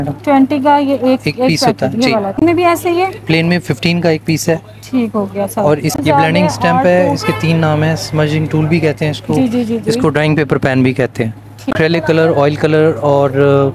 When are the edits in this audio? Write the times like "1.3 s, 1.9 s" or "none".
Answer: 2.4 s, 6.0 s, 11.8 s